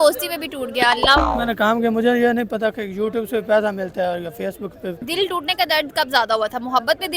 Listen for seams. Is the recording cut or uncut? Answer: cut